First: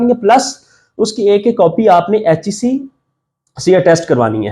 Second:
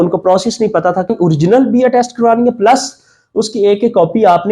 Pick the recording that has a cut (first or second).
second